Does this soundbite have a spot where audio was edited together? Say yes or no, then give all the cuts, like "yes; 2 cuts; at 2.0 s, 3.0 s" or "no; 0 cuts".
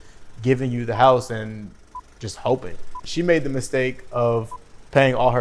yes; 1 cut; at 3.0 s